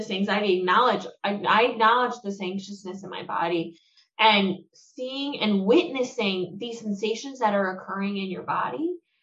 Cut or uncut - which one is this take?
uncut